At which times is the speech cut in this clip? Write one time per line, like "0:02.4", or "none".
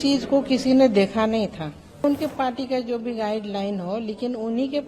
0:02.0